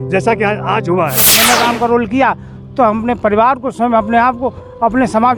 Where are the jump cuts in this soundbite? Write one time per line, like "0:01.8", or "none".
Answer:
0:01.3